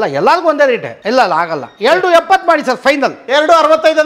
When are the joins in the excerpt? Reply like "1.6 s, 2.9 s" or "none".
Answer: 0.9 s

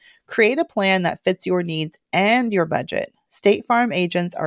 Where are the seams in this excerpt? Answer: none

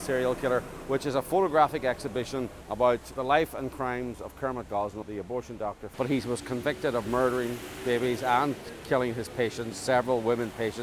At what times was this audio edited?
5.9 s

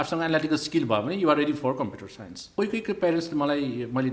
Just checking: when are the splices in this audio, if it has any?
2.5 s

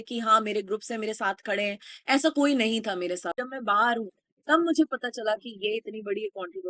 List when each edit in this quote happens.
3.3 s

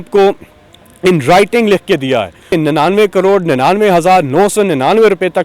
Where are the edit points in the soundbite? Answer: 2.5 s

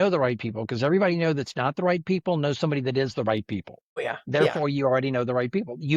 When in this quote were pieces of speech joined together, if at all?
4.1 s

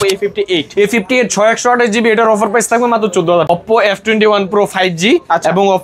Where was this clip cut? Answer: 3.5 s

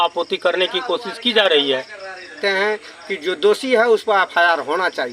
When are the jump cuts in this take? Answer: 2.4 s

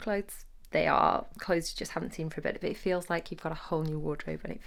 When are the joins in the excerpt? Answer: none

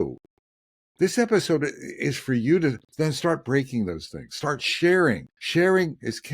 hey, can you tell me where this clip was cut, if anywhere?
5.3 s

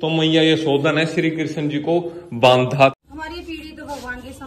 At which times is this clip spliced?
2.9 s

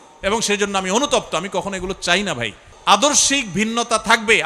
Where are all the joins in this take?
2.6 s

